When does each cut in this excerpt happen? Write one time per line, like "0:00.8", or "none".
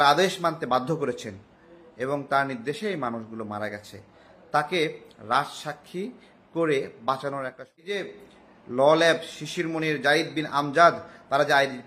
0:07.9